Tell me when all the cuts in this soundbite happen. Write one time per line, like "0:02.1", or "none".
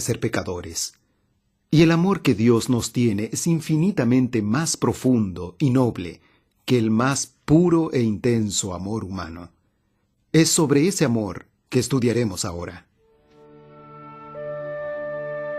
0:02.6